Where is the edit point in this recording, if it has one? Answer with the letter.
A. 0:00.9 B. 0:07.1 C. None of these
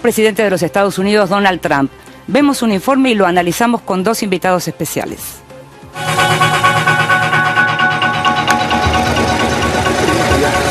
C